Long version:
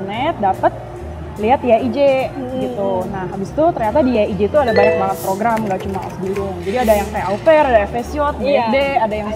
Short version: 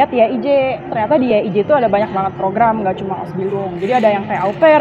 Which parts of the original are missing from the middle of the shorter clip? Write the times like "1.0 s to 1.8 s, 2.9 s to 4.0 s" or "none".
2.4 s to 3.8 s